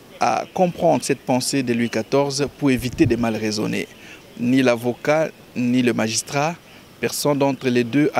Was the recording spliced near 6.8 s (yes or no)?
no